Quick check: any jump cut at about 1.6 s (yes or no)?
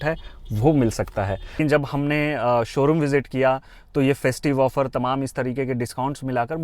yes